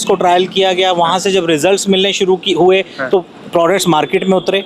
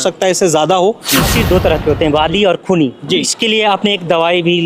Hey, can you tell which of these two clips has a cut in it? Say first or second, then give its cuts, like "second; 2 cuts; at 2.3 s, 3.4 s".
second; 2 cuts; at 1.3 s, 3.3 s